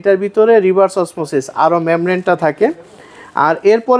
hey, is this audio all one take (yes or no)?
yes